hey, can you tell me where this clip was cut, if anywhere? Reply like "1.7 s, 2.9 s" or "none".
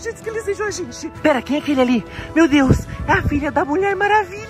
1.0 s